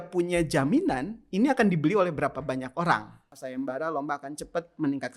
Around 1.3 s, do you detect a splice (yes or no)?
no